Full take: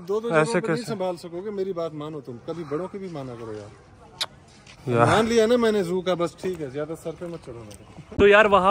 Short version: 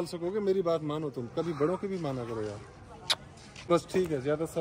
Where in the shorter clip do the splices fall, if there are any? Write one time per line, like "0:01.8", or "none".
0:03.7